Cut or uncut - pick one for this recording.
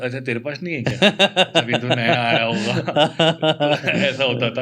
uncut